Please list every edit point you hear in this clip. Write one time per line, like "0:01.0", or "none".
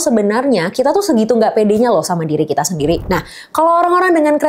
0:03.0